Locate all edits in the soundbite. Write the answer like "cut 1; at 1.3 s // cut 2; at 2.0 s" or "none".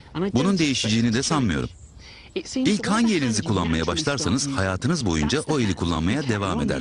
none